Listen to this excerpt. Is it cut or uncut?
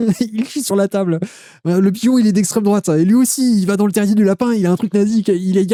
uncut